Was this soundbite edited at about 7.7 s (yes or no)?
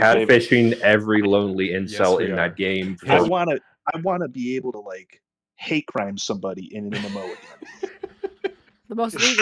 no